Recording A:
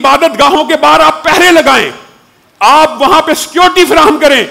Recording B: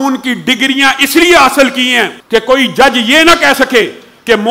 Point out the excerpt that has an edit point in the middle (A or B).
B